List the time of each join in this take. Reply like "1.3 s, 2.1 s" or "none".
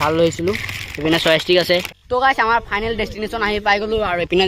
2.0 s